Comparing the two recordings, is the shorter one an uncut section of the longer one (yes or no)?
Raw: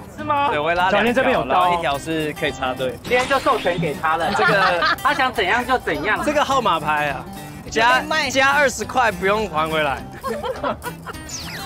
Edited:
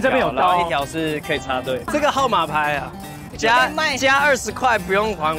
no